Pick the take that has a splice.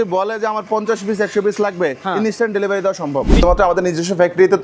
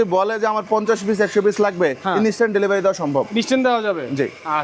first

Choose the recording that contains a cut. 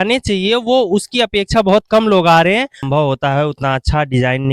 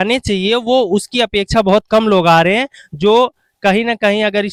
first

